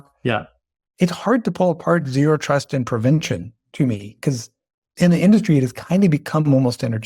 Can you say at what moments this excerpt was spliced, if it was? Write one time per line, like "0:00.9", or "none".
0:04.9